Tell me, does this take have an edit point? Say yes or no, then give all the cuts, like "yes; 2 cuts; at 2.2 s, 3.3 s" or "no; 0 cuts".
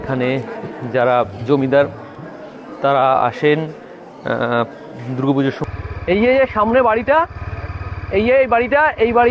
yes; 1 cut; at 5.6 s